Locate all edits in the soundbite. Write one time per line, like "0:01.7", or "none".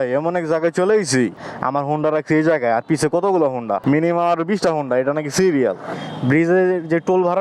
0:01.5
0:03.8
0:05.9

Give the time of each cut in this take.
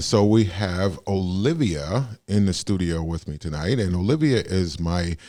none

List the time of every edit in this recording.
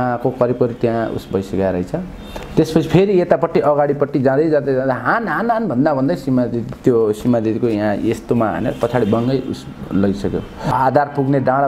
0:10.7

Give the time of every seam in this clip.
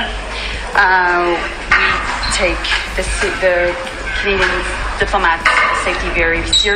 none

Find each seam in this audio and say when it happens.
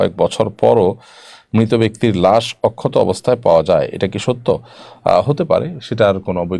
none

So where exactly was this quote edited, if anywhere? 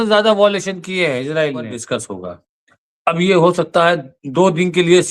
0:01.8

